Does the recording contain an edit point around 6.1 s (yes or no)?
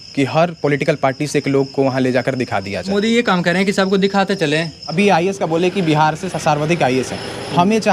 no